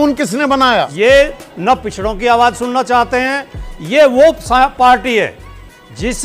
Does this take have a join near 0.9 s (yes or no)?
yes